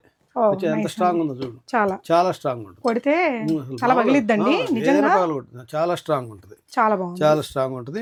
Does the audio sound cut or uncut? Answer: uncut